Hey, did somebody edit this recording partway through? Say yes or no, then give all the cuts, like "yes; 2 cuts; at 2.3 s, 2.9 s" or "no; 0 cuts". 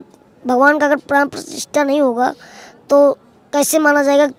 no; 0 cuts